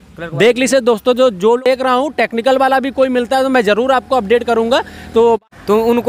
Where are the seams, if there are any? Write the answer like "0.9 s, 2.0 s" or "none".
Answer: 1.6 s, 5.4 s

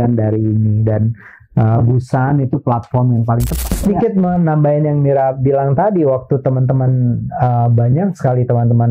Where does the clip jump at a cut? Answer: 3.7 s

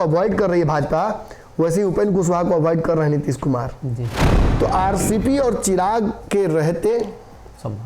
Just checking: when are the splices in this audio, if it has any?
4.4 s

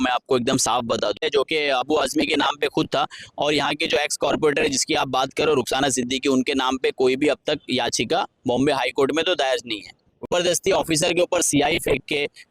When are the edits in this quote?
1.2 s, 10.3 s

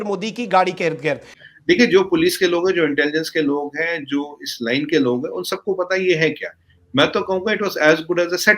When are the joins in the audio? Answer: 1.3 s

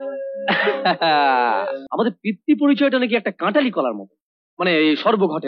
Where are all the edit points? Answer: 1.8 s

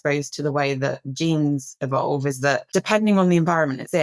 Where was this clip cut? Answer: 2.6 s

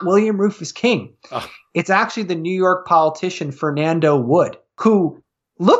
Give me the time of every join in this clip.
4.6 s

